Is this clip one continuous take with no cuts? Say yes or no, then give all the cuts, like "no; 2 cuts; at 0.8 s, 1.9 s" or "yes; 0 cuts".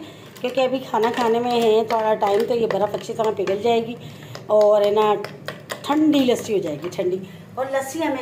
yes; 0 cuts